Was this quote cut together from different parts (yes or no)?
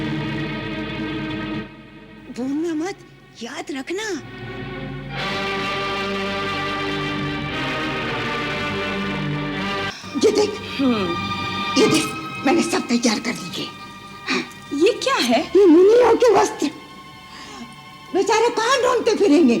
yes